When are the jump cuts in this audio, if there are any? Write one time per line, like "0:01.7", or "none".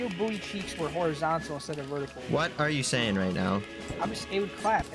0:03.8